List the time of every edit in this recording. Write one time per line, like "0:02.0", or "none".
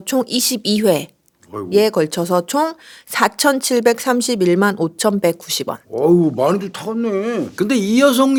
none

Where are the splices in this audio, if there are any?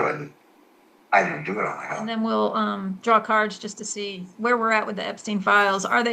0:02.1

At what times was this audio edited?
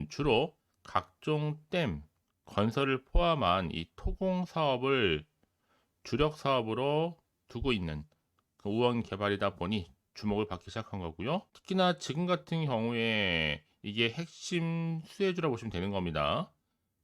0:11.5

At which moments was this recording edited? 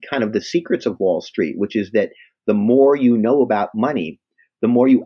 none

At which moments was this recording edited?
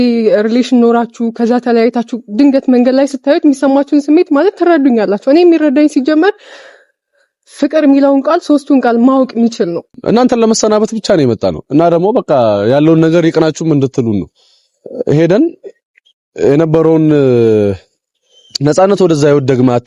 0:10.3

